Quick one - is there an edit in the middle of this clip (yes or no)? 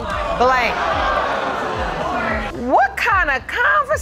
no